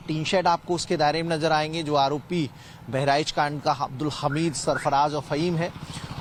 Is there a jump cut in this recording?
no; 0 cuts

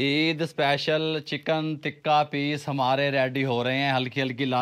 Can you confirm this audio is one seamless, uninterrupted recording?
yes; 0 cuts

